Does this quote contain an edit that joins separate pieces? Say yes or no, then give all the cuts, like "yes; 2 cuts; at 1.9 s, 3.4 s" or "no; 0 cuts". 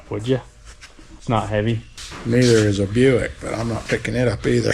no; 0 cuts